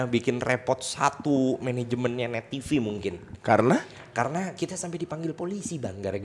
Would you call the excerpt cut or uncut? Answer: uncut